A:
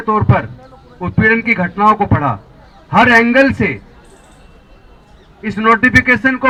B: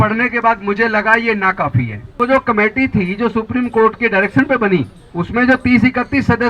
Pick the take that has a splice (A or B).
B